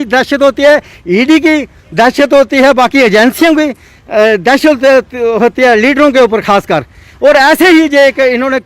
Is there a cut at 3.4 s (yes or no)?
no